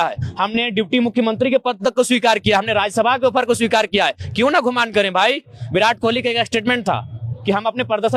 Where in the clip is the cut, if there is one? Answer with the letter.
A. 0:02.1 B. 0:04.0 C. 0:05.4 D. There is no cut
D